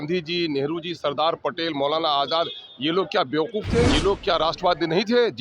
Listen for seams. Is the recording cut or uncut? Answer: cut